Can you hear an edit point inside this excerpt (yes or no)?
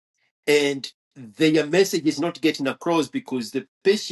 no